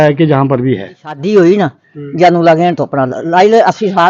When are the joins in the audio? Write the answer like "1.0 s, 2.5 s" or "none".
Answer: 1.2 s